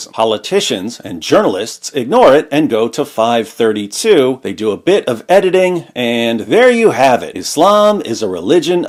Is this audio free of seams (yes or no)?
yes